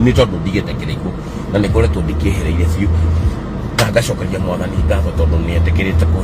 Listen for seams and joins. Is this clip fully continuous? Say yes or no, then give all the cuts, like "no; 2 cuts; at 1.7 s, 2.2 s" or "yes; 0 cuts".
yes; 0 cuts